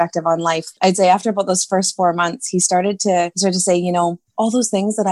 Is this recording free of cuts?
no; 1 cut; at 3.3 s

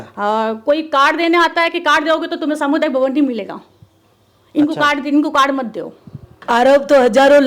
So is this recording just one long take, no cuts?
no; 1 cut; at 6.3 s

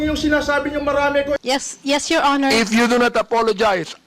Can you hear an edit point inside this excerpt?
yes; 1 cut; at 1.4 s

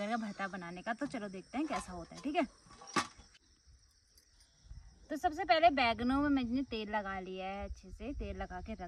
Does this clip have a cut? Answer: no; 0 cuts

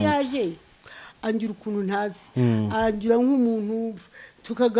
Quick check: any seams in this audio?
no; 0 cuts

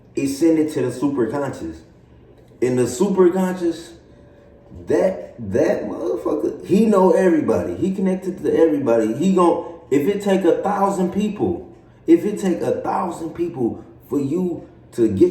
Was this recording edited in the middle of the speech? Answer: no; 0 cuts

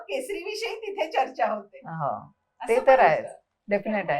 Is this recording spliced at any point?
no; 0 cuts

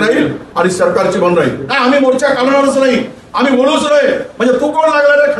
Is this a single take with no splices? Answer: no; 1 cut; at 1.6 s

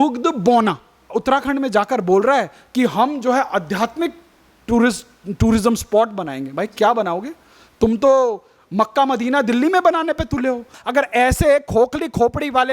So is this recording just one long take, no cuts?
no; 2 cuts; at 1.1 s, 10.8 s

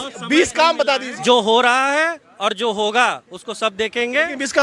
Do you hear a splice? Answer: yes; 1 cut; at 1.1 s

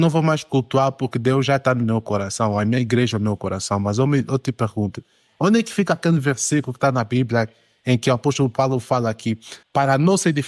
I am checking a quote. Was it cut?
yes; 1 cut; at 9.5 s

